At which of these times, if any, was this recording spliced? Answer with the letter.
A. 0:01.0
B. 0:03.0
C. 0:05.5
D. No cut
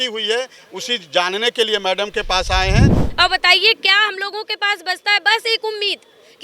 B